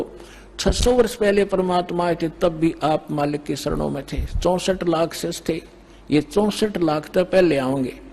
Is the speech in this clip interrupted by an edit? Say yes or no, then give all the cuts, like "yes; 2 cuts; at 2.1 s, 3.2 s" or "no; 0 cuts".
no; 0 cuts